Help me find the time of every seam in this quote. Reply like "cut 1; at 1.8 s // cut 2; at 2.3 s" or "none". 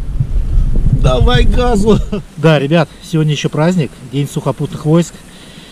cut 1; at 2.2 s